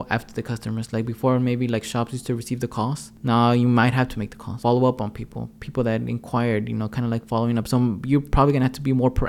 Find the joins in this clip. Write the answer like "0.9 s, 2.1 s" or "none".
3.1 s, 4.5 s

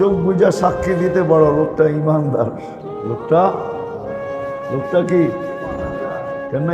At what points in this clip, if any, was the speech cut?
3.5 s, 4.8 s

